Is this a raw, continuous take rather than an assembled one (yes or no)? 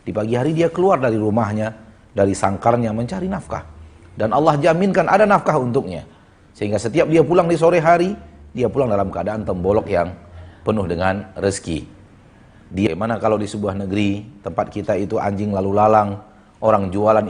no